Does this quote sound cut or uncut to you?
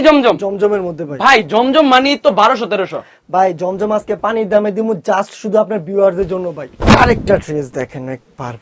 cut